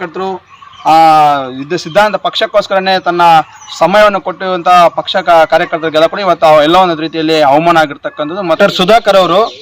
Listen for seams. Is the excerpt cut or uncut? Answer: cut